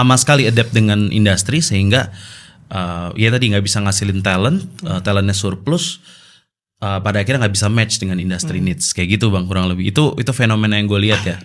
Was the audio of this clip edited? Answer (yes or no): no